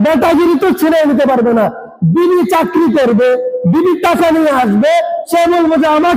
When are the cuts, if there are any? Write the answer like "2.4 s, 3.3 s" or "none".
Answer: none